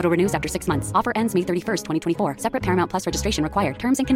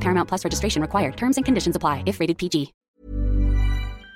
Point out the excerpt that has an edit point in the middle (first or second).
second